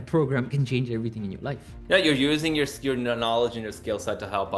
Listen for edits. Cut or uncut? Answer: cut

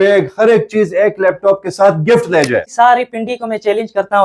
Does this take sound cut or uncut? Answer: cut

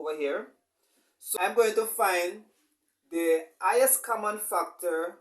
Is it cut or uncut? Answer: cut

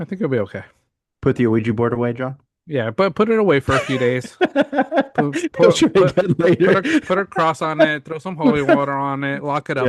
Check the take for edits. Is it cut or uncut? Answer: uncut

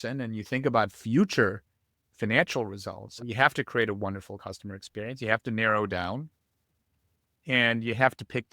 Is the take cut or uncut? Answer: cut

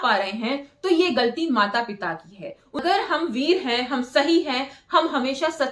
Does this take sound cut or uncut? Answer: cut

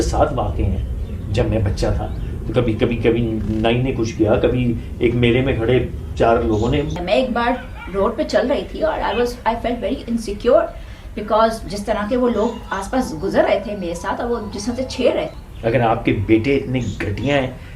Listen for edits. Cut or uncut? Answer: cut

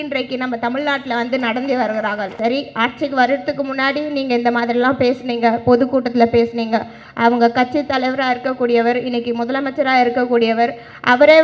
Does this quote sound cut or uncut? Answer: cut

